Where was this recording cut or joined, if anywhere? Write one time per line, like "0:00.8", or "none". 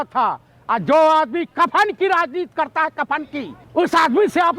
0:03.6